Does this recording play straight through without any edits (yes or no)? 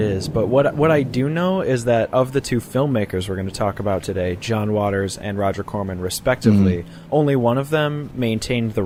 yes